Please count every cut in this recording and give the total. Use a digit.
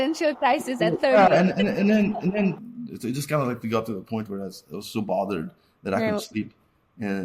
1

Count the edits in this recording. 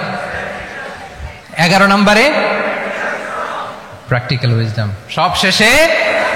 1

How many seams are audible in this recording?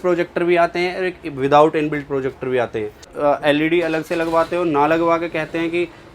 1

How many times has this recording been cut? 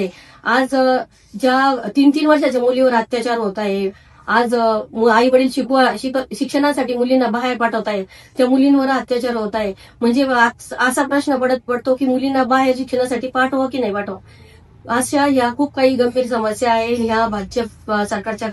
0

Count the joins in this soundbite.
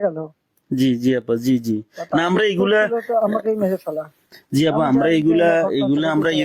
0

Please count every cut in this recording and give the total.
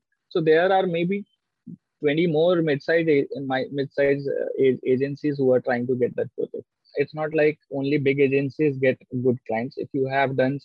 1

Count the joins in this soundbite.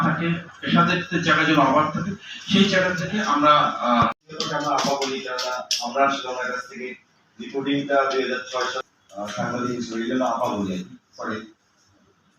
1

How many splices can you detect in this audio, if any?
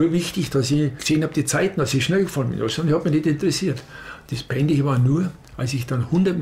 1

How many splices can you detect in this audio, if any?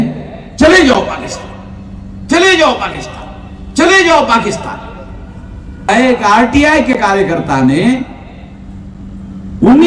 1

